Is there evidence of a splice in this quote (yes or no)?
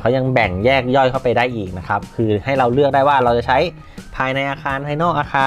no